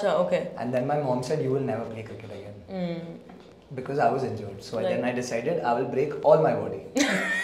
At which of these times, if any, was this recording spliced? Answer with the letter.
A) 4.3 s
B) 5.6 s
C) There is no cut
C